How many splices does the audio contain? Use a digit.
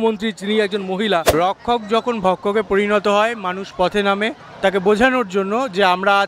1